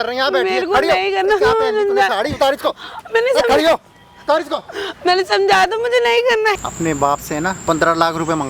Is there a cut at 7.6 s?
yes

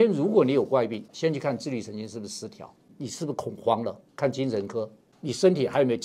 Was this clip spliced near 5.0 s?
yes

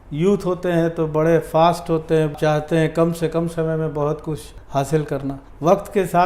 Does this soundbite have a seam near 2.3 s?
yes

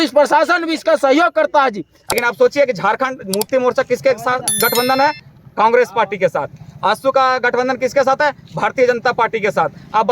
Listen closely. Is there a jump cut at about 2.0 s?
yes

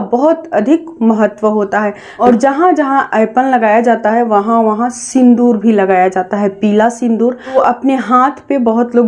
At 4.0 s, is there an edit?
no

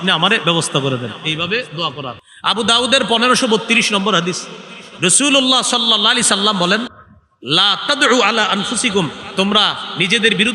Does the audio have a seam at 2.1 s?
yes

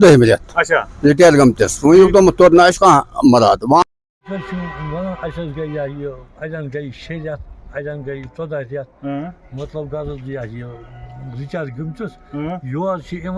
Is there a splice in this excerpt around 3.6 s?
yes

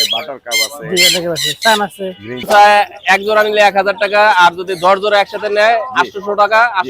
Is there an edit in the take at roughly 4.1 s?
no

